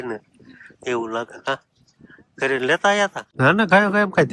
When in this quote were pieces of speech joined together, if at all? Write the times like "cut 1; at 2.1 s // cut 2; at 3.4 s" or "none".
cut 1; at 3.2 s